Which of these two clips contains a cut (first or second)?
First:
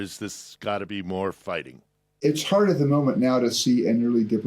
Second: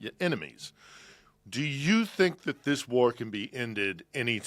first